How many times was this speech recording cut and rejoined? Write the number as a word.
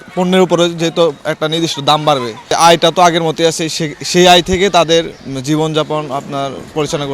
two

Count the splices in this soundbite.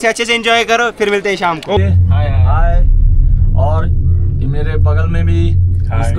one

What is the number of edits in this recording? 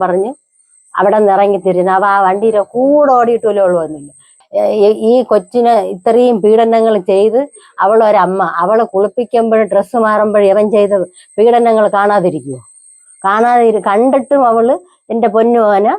one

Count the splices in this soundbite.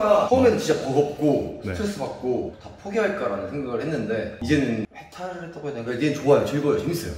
zero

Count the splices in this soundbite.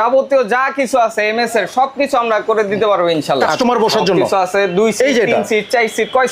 one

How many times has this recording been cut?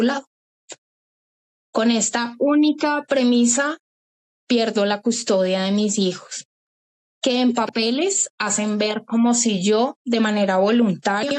zero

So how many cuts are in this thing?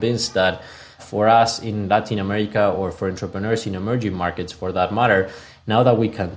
one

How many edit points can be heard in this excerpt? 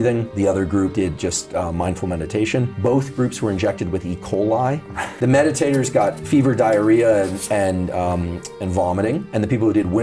one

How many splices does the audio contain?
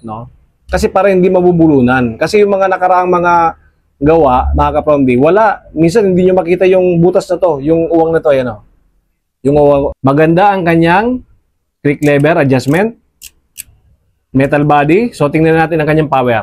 one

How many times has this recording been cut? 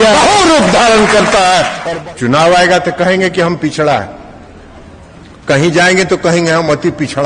one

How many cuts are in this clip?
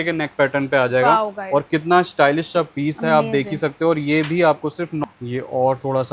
one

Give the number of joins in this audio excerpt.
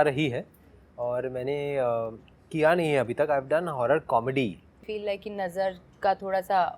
one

